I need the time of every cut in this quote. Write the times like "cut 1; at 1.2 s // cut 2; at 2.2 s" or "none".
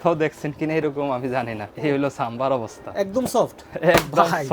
cut 1; at 1.6 s